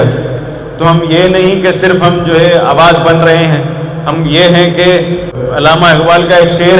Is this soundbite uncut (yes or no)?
no